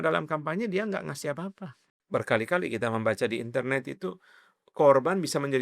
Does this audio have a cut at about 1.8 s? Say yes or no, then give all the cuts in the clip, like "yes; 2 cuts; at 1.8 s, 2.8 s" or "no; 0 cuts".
yes; 1 cut; at 1.8 s